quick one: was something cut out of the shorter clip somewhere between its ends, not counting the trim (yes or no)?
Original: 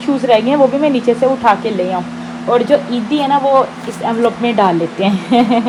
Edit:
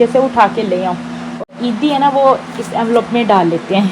yes